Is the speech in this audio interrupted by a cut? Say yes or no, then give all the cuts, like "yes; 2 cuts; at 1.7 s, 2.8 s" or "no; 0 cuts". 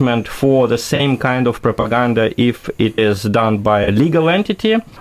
no; 0 cuts